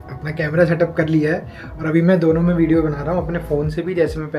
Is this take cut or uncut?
uncut